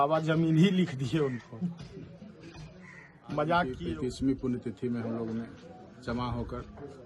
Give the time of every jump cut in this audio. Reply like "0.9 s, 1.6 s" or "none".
3.8 s